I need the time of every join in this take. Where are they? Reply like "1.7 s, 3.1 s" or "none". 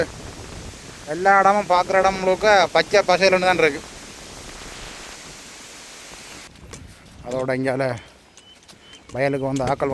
6.5 s

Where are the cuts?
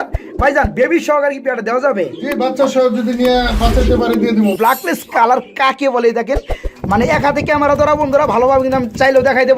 4.5 s

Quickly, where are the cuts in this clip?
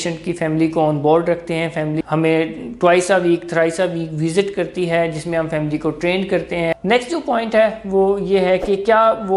2.0 s, 6.7 s

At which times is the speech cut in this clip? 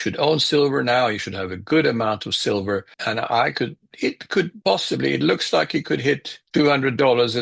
2.9 s, 4.5 s, 6.3 s

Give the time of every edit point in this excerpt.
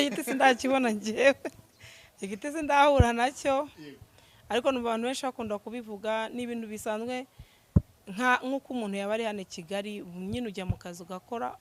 none

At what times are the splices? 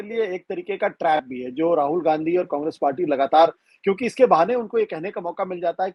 none

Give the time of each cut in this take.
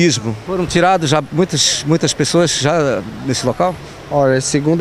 2.3 s

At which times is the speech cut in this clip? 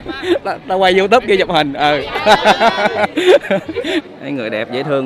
4.1 s

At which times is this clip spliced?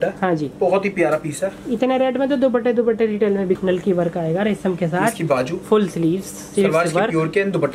3.6 s

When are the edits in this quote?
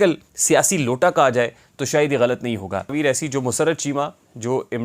2.9 s

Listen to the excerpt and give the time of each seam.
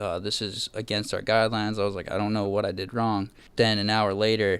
3.4 s

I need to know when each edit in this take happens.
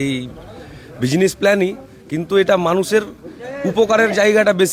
none

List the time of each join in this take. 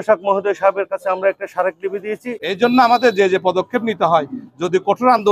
2.5 s

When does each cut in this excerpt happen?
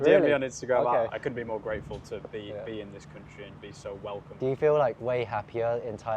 1.1 s, 4.3 s

